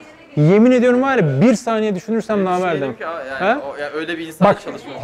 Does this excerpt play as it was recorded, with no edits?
yes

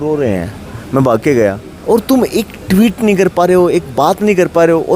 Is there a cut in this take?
yes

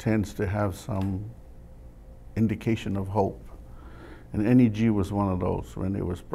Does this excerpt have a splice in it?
no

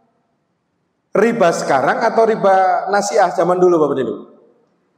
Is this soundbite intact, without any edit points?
yes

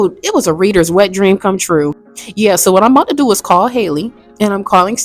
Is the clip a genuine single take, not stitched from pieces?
no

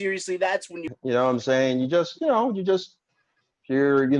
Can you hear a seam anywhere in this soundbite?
yes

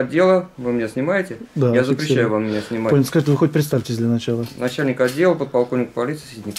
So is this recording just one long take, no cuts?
yes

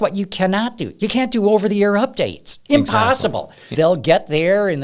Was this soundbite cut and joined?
yes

